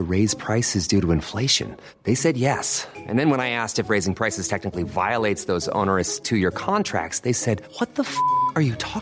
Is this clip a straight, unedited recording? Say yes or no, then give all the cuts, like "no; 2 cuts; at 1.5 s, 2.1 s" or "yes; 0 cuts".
yes; 0 cuts